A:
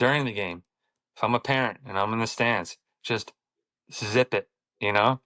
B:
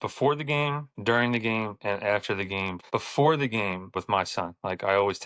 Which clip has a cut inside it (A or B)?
B